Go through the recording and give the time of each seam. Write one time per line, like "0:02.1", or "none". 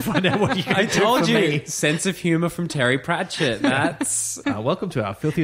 0:04.4